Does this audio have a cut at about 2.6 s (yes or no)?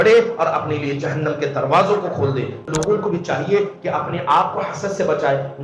yes